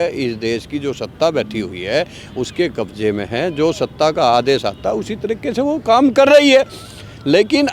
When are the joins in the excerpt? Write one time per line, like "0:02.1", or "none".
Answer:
none